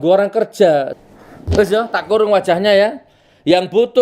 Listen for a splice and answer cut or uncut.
cut